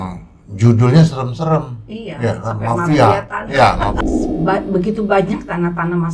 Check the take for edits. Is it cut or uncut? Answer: cut